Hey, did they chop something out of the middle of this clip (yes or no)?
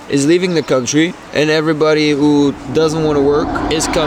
no